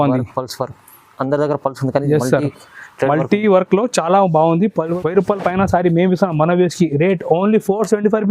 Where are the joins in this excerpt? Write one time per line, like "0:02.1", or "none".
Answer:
0:04.9